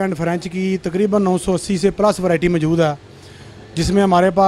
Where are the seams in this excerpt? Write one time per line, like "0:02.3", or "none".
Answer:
none